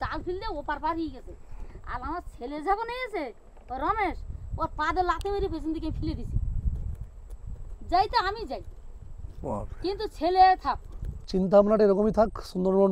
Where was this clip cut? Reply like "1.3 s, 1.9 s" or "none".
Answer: 11.3 s